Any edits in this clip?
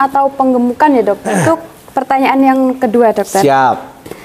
yes; 1 cut; at 1.4 s

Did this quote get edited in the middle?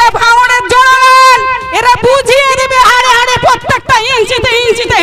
no; 0 cuts

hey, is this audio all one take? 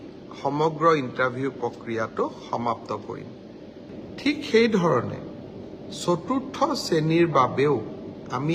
no; 1 cut; at 3.9 s

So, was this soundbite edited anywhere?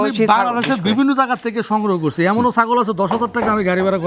no; 0 cuts

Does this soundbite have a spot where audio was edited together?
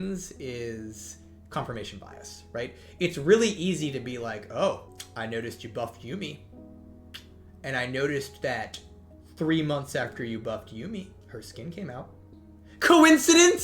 yes; 1 cut; at 5.0 s

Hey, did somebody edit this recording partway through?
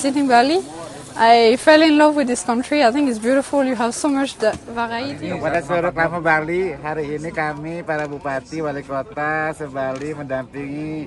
yes; 1 cut; at 5.2 s

